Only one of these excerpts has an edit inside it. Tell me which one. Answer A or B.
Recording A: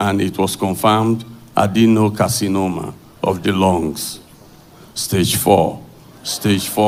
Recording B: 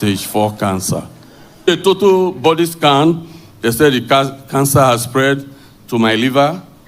B